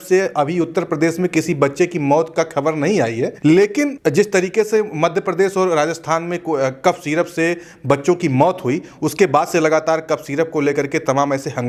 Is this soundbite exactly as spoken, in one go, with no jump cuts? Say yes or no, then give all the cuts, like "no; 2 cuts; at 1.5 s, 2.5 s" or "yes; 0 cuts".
yes; 0 cuts